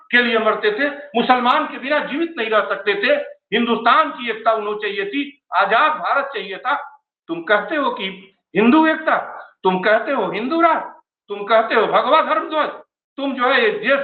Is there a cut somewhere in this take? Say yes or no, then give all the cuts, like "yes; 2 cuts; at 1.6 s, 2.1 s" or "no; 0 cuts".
no; 0 cuts